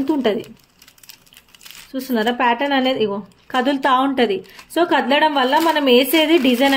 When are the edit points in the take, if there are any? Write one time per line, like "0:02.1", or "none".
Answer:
none